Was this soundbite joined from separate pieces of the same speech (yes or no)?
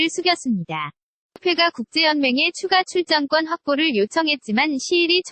yes